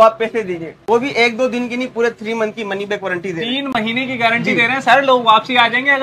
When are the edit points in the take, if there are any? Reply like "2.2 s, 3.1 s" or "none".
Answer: none